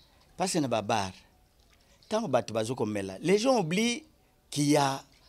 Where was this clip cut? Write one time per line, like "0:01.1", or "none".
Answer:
none